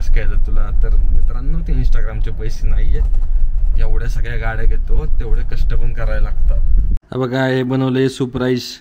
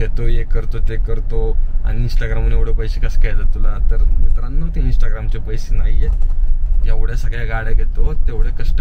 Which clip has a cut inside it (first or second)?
first